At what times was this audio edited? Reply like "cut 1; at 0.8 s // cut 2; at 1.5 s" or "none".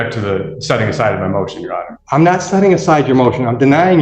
cut 1; at 1.9 s